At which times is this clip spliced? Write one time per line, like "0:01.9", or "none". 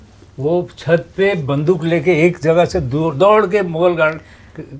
none